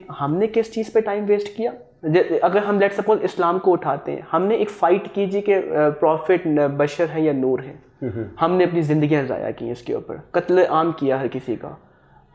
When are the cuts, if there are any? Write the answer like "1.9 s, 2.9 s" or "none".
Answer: none